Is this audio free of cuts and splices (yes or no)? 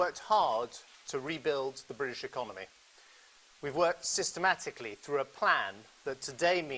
yes